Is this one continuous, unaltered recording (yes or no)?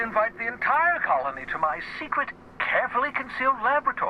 yes